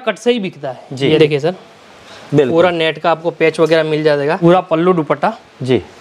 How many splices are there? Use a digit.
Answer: 2